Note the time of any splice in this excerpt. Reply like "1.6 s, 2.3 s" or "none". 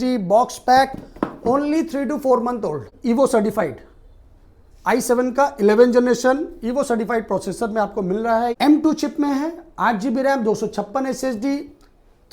2.9 s, 8.5 s